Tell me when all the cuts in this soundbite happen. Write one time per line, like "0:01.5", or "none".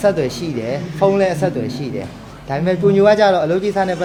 none